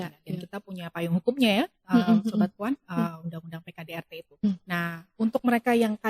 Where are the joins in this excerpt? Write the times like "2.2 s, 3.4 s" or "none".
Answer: 4.4 s